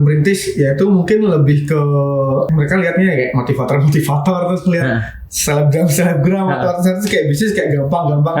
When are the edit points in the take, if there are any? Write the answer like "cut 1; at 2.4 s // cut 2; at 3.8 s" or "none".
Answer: cut 1; at 2.5 s